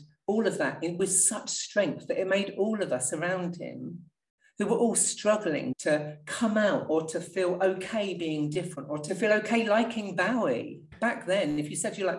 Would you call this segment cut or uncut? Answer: cut